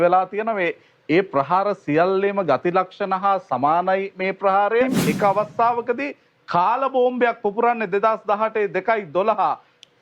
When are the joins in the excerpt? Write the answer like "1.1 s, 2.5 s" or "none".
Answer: 4.9 s